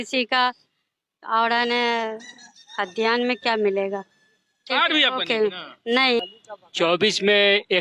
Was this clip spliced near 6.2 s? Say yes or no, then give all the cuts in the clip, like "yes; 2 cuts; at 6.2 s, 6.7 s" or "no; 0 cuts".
yes; 1 cut; at 6.2 s